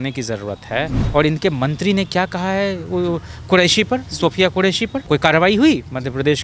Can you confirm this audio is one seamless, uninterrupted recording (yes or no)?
no